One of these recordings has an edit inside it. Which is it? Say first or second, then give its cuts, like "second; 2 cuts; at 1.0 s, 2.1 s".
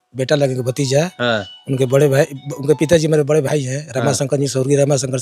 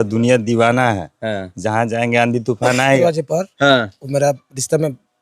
second; 1 cut; at 3.0 s